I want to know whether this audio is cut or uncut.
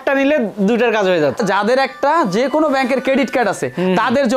cut